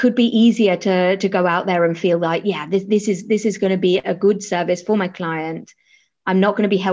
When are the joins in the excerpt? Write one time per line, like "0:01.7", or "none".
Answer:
none

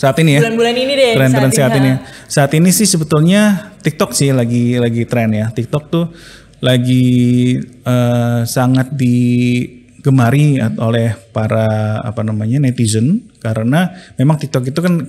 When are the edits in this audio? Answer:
none

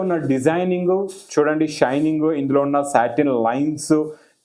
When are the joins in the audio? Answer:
none

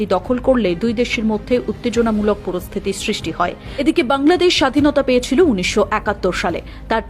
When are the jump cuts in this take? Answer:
0:03.7

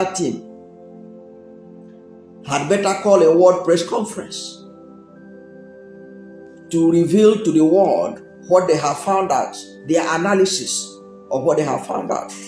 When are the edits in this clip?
0:00.9
0:02.5
0:04.3
0:06.3

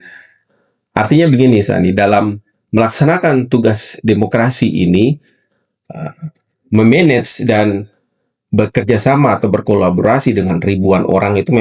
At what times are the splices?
none

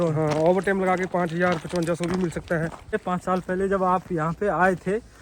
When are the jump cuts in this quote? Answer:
0:02.9

